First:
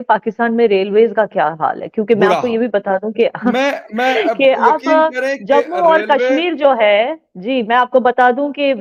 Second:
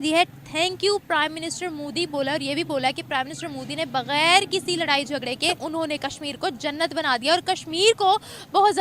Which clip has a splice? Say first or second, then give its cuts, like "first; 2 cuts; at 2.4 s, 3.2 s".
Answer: second; 1 cut; at 5.6 s